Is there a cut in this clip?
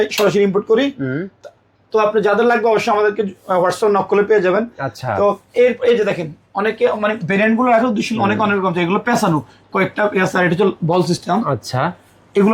no; 0 cuts

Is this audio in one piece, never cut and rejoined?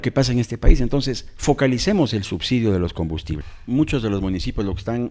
no; 1 cut; at 3.5 s

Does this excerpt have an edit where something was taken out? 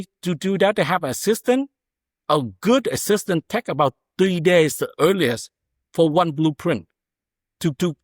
no; 0 cuts

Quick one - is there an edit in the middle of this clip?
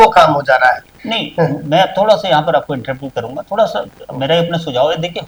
no; 0 cuts

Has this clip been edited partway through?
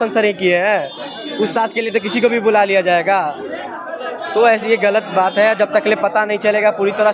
no; 0 cuts

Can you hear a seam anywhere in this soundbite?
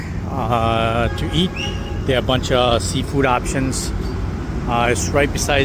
no; 0 cuts

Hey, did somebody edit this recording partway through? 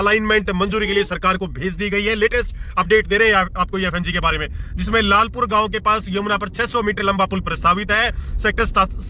no; 0 cuts

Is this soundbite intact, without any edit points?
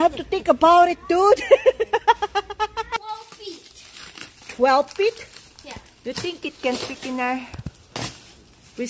no; 1 cut; at 3.0 s

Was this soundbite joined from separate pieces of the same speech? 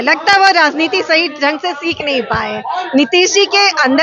no; 0 cuts

